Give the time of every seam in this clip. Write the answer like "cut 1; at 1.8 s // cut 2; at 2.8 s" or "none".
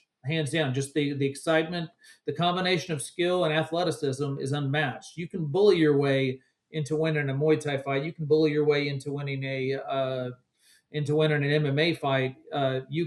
none